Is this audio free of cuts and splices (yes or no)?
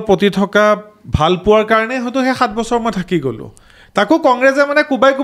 yes